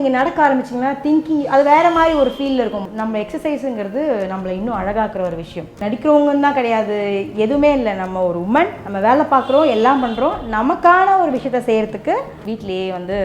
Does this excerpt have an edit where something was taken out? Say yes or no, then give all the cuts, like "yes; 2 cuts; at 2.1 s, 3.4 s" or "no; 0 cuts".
yes; 4 cuts; at 2.8 s, 5.8 s, 8.8 s, 12.3 s